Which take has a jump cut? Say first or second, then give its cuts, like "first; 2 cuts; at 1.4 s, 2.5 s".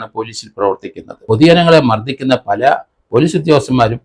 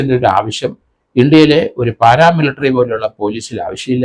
first; 1 cut; at 1.3 s